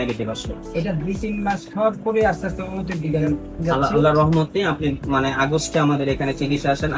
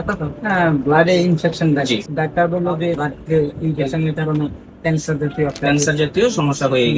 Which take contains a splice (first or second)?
second